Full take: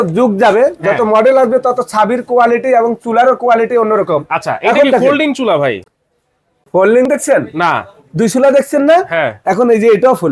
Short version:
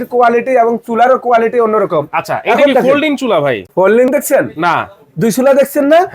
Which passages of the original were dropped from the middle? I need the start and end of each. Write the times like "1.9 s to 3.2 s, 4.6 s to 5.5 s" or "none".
5.8 s to 6.6 s